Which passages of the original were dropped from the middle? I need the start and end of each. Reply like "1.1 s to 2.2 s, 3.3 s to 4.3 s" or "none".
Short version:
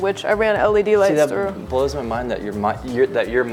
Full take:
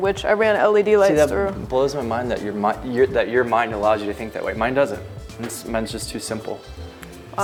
none